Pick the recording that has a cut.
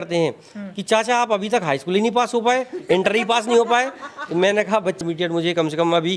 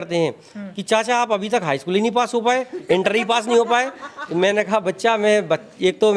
first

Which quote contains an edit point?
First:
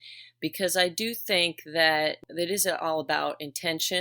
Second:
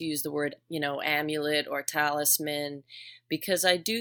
first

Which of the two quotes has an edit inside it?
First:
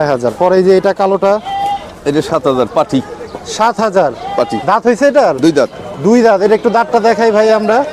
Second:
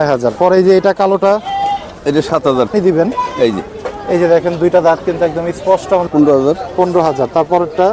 second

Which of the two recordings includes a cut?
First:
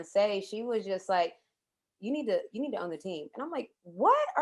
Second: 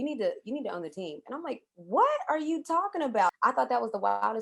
second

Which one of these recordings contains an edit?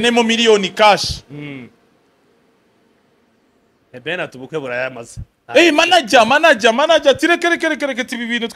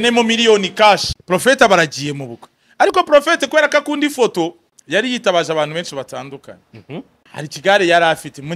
second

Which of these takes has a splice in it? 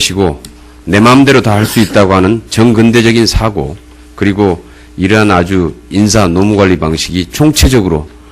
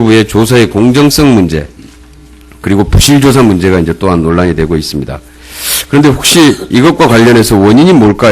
second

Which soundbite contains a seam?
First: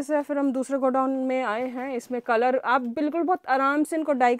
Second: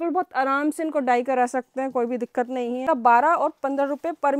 second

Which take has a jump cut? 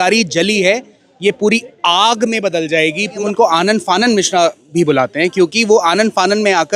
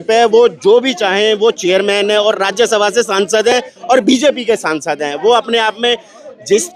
first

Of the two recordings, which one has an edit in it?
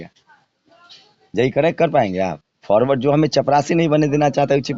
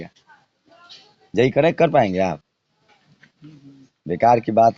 first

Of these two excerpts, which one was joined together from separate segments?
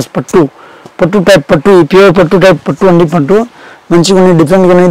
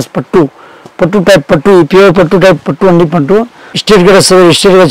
second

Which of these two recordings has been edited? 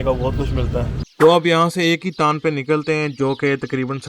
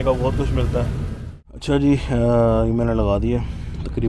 first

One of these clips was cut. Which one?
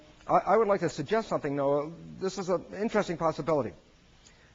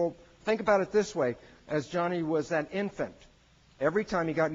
second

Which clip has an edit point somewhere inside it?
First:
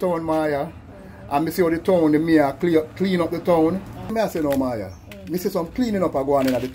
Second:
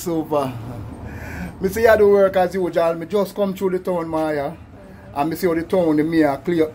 first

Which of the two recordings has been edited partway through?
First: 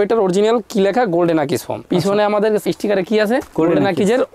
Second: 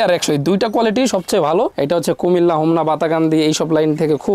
second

